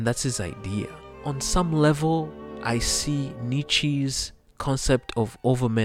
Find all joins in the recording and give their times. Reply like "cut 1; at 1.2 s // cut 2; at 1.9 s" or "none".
cut 1; at 1.0 s // cut 2; at 2.5 s